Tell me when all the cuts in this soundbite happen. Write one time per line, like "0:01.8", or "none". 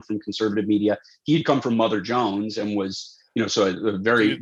none

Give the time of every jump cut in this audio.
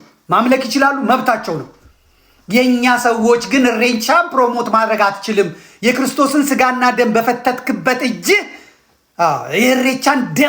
none

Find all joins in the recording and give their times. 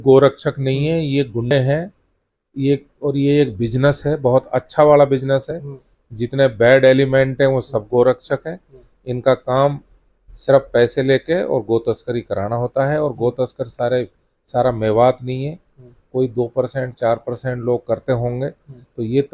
0:01.5

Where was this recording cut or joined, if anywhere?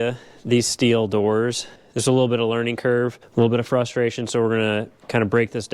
0:01.7
0:03.2

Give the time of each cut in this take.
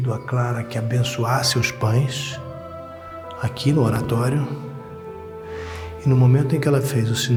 none

